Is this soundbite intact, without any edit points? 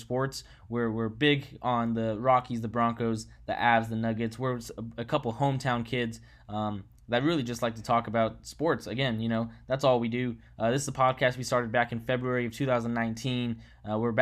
yes; 0 cuts

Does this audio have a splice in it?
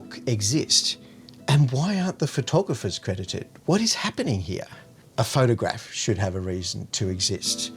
yes; 1 cut; at 4.7 s

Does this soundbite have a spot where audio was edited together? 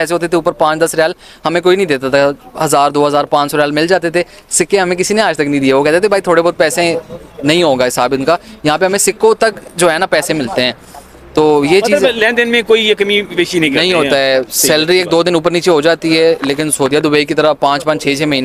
no; 0 cuts

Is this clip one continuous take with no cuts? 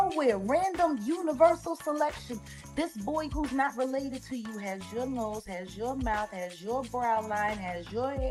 yes; 0 cuts

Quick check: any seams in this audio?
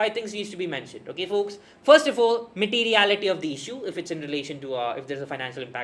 no; 0 cuts

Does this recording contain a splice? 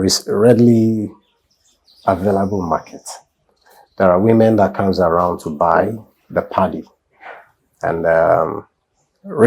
no; 0 cuts

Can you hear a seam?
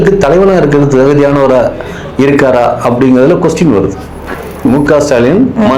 yes; 1 cut; at 4.6 s

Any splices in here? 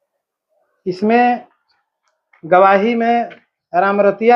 no; 0 cuts

